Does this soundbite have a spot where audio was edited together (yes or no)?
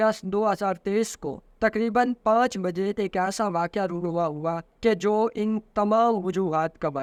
no